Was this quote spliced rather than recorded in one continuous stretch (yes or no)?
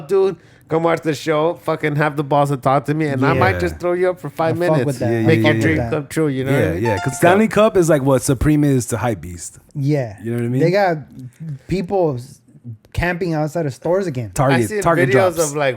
yes